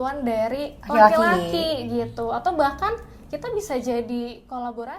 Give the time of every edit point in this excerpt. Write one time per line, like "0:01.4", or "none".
none